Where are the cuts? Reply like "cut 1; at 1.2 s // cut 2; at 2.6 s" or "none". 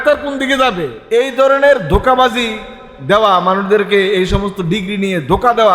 cut 1; at 0.9 s